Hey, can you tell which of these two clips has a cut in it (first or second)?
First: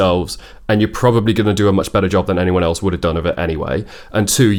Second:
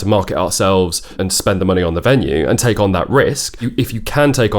second